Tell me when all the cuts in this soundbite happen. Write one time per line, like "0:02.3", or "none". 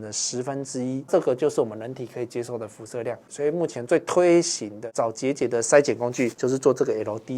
0:01.1
0:03.2
0:04.9
0:06.4